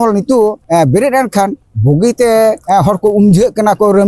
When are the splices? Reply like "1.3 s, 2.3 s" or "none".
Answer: 2.6 s